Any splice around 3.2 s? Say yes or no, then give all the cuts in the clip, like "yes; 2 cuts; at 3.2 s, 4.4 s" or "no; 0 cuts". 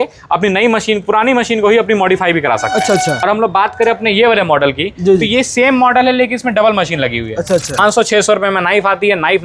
yes; 2 cuts; at 3.2 s, 7.8 s